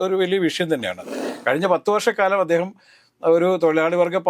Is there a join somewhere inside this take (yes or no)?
yes